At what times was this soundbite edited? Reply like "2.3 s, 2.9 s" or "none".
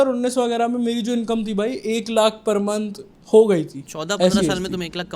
3.8 s